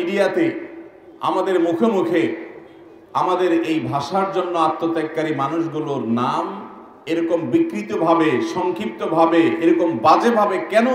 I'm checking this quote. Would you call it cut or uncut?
uncut